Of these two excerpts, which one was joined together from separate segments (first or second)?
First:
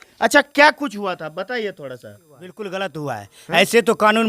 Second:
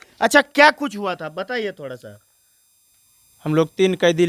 first